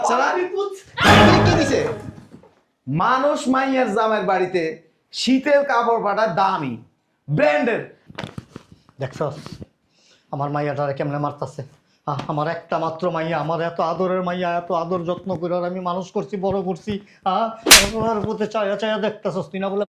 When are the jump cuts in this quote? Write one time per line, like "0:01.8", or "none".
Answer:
none